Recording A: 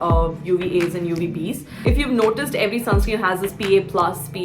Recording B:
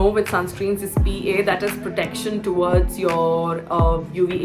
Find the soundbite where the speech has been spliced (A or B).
A